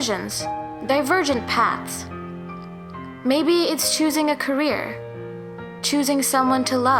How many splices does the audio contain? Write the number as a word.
zero